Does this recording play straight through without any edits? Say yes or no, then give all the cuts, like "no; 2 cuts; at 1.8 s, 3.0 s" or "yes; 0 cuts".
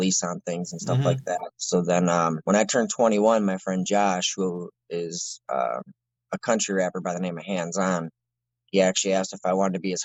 yes; 0 cuts